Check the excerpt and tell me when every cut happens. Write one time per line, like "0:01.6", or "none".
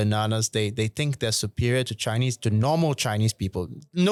none